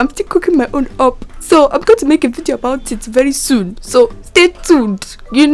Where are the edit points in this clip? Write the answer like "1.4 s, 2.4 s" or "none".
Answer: none